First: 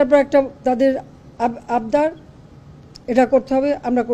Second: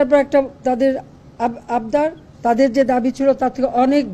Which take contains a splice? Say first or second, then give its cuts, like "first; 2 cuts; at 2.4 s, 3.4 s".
second; 1 cut; at 2.6 s